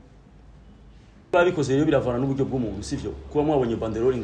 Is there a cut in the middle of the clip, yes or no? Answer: yes